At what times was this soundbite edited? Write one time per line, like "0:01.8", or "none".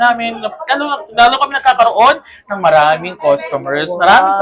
none